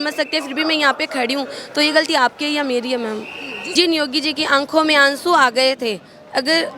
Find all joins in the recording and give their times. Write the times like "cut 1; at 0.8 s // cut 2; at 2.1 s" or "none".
cut 1; at 3.6 s